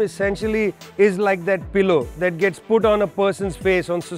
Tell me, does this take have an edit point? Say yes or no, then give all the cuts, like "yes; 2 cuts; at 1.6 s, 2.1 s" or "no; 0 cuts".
no; 0 cuts